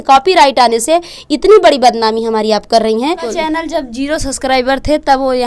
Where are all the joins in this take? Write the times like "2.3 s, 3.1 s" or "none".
3.2 s